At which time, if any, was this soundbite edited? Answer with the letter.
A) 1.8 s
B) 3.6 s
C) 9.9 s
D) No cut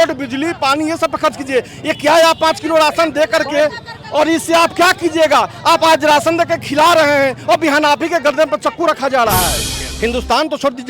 C